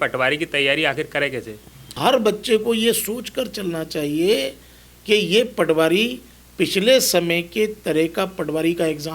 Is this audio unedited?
no; 1 cut; at 2.0 s

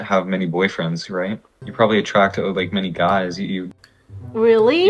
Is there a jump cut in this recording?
yes; 1 cut; at 1.5 s

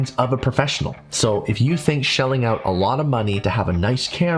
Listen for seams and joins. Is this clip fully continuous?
no; 1 cut; at 0.9 s

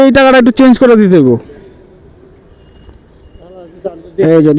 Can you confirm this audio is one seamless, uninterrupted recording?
yes; 0 cuts

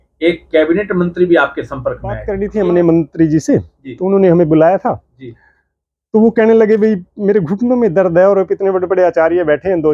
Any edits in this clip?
yes; 1 cut; at 2.3 s

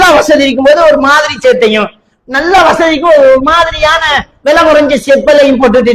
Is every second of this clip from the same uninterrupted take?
yes; 0 cuts

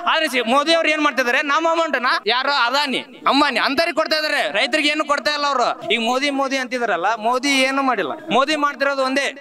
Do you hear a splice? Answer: yes; 3 cuts; at 2.2 s, 5.8 s, 8.2 s

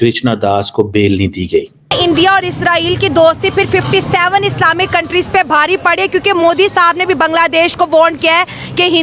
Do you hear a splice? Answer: yes; 1 cut; at 1.8 s

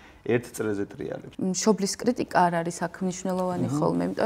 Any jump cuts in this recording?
yes; 1 cut; at 1.2 s

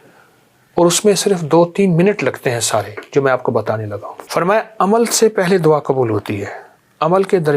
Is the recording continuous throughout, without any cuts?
no; 1 cut; at 4.1 s

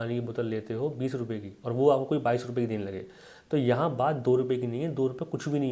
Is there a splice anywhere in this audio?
no; 0 cuts

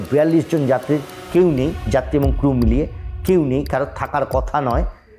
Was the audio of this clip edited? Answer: no; 0 cuts

